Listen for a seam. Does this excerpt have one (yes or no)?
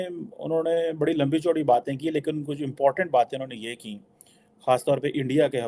no